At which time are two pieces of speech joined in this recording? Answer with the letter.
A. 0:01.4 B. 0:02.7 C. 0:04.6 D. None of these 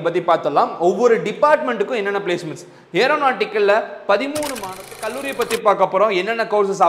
C